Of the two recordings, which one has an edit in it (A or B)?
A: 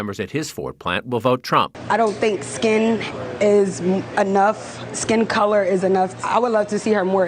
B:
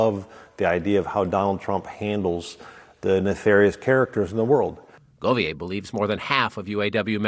A